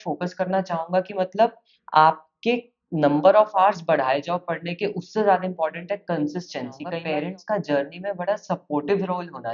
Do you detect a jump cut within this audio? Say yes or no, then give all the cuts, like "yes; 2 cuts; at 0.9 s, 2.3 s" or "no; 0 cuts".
yes; 1 cut; at 6.9 s